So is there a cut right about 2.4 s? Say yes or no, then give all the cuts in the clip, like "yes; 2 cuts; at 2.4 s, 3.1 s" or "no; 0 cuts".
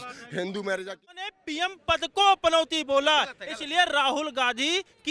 no; 1 cut; at 0.9 s